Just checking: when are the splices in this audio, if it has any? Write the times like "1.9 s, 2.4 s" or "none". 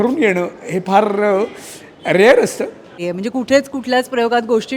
3.0 s